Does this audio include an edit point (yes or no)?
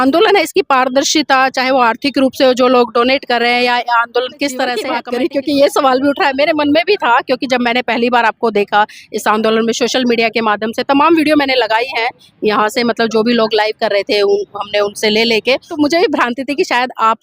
yes